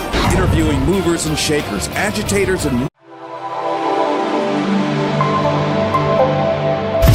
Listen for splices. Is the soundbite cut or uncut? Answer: uncut